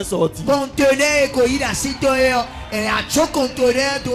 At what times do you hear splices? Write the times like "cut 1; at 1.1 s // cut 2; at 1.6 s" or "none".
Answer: none